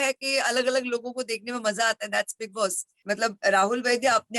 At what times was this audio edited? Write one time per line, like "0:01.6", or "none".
0:02.9